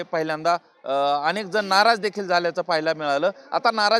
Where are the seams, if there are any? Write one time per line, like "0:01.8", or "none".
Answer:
none

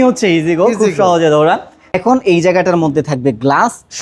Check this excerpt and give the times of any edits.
0:01.9

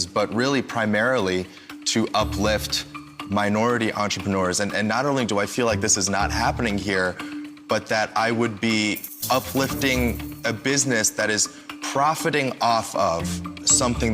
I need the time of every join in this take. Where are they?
0:05.3
0:09.1

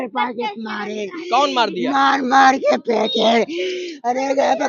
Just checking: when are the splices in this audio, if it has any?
none

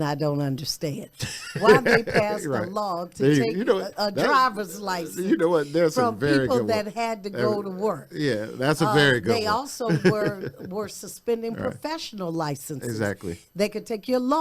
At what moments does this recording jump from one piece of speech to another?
none

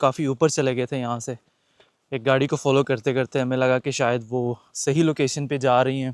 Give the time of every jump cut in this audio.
none

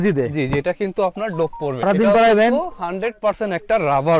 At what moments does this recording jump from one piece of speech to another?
none

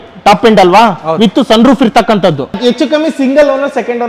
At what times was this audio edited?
0:02.6

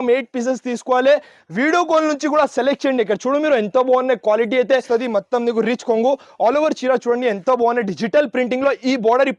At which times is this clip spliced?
0:04.8

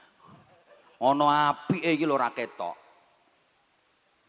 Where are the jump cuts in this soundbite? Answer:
none

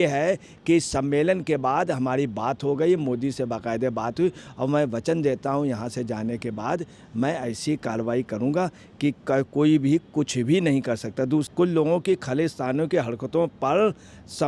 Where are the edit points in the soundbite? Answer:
0:11.5

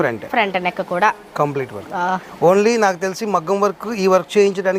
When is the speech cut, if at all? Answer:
none

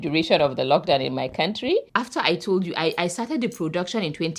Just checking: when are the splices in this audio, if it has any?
0:01.9

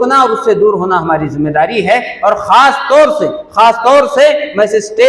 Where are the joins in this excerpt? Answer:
none

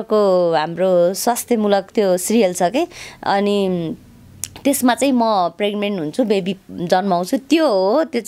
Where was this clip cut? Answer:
none

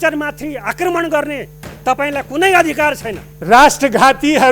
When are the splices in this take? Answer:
0:03.3

